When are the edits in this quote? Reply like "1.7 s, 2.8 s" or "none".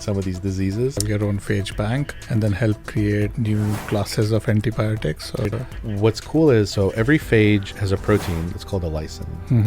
1.0 s, 2.2 s, 3.3 s, 5.6 s